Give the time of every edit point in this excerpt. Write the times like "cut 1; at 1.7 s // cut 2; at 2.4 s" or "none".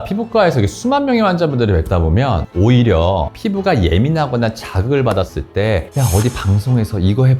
cut 1; at 2.5 s // cut 2; at 5.4 s